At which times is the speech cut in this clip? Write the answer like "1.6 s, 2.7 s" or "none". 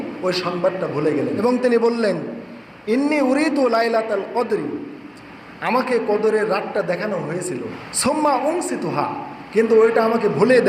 1.4 s, 7.8 s